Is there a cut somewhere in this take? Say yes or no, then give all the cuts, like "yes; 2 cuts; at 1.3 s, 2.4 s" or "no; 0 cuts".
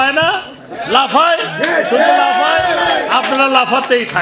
no; 0 cuts